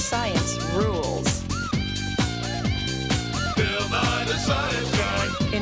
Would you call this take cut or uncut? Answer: uncut